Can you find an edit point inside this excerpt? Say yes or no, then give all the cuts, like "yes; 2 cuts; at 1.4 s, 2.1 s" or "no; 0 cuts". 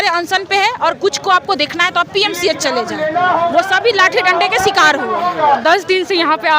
yes; 1 cut; at 5.6 s